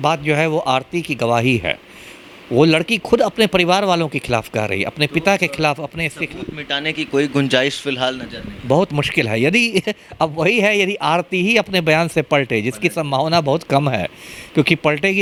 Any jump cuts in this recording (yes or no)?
no